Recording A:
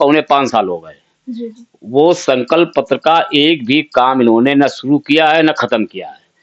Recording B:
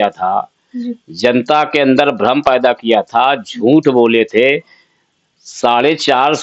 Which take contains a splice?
A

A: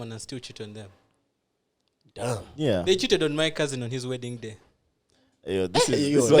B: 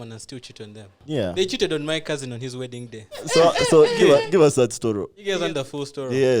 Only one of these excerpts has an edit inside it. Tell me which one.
B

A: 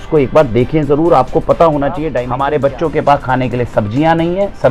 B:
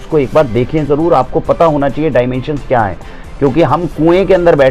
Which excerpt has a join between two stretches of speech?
A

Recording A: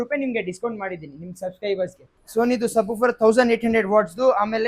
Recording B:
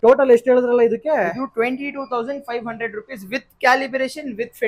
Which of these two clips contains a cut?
A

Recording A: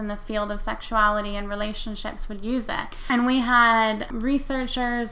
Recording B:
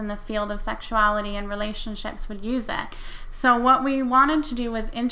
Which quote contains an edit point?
A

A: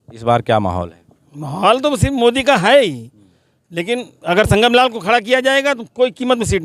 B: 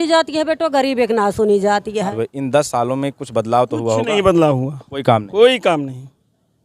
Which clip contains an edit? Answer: B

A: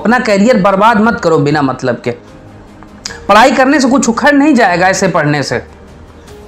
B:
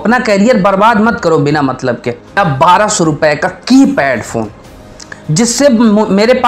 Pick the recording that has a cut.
B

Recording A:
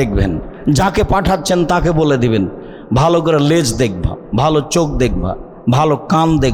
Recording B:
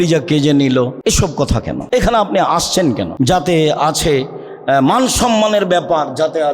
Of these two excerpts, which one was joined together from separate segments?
B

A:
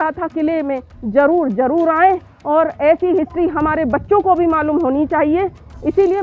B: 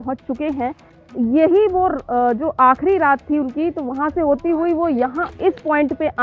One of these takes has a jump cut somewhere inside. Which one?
B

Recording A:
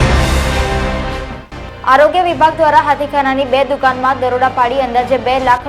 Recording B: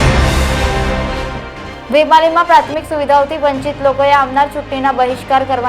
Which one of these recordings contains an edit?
B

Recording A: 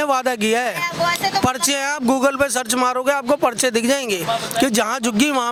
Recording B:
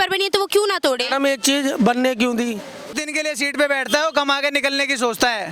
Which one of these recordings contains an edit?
B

